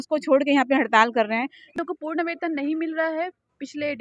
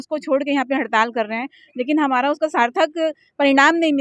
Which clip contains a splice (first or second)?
first